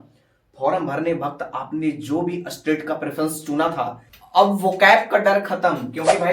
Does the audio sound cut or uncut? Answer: uncut